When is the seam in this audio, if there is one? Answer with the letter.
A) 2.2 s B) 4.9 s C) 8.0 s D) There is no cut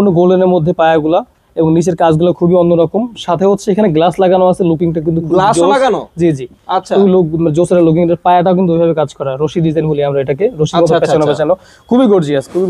D